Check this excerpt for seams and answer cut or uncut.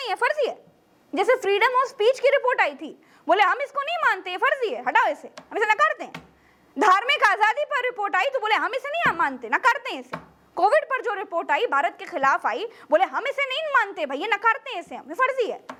uncut